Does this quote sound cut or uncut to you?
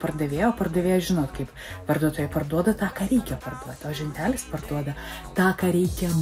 uncut